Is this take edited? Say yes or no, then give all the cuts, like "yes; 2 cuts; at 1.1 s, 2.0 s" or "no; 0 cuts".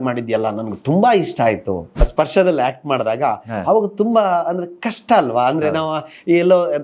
yes; 1 cut; at 2.0 s